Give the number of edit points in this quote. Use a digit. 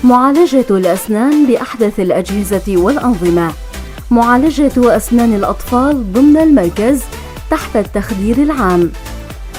0